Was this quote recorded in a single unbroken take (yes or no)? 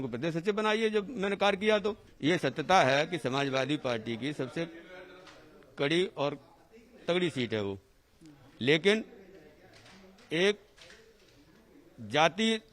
no